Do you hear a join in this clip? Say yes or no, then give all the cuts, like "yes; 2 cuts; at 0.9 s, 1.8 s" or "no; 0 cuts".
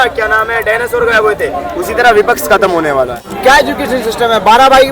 yes; 1 cut; at 3.3 s